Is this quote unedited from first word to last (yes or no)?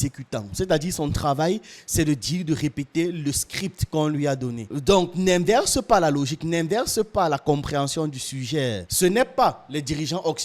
no